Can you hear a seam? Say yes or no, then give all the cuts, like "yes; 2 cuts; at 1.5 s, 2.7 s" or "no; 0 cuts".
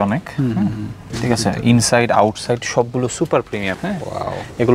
yes; 1 cut; at 3.8 s